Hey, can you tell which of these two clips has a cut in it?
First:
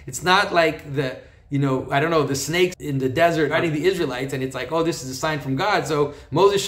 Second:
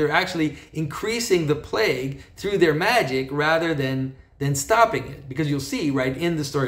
first; 2 cuts; at 2.8 s, 3.5 s

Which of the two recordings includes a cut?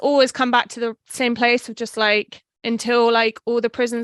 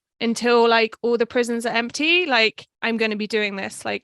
second; 1 cut; at 2.7 s

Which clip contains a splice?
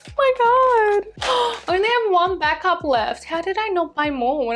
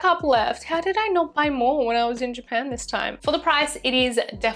second; 1 cut; at 3.1 s

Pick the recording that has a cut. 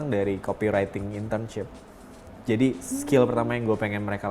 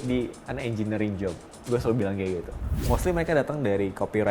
second; 1 cut; at 2.6 s

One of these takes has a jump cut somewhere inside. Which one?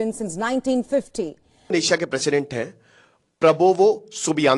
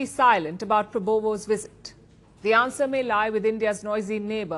first; 1 cut; at 1.7 s

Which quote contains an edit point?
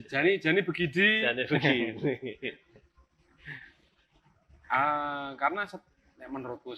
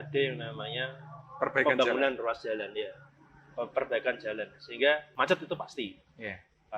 second; 1 cut; at 5.1 s

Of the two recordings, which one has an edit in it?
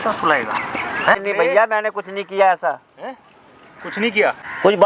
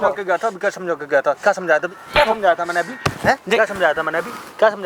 first; 1 cut; at 1.2 s

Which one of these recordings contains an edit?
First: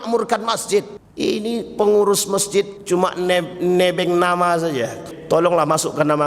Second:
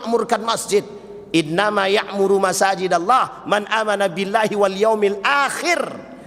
first; 3 cuts; at 1.0 s, 2.8 s, 5.1 s

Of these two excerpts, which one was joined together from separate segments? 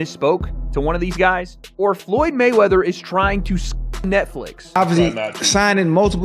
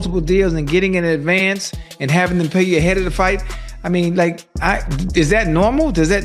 first; 1 cut; at 4.8 s

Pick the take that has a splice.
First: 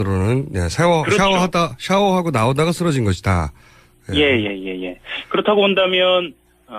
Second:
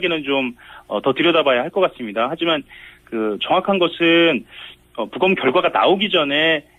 first; 1 cut; at 5.2 s

